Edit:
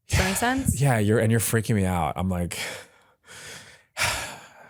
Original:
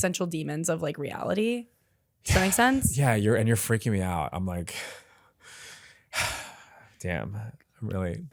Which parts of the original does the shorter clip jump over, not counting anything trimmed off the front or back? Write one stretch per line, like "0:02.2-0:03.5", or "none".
none